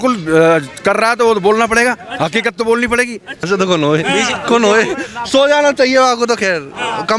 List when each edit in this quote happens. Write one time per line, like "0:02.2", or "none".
0:03.5